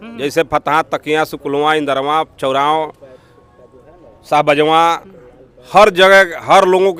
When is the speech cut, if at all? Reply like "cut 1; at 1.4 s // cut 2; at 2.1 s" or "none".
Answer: none